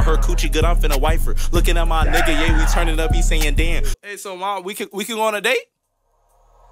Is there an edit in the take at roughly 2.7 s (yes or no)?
no